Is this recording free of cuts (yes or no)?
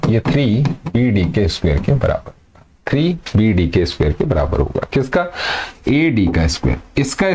yes